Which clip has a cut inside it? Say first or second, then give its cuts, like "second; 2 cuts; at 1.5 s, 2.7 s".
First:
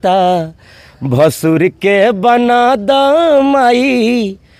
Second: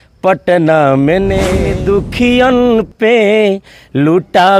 second; 1 cut; at 1.6 s